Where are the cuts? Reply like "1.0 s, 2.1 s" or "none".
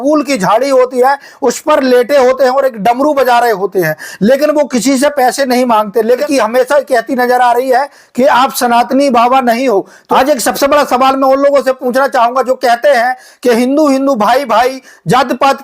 6.2 s, 10.1 s